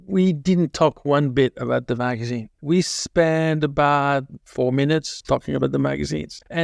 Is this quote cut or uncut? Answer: uncut